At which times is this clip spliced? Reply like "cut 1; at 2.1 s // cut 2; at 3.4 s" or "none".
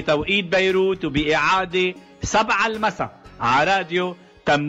none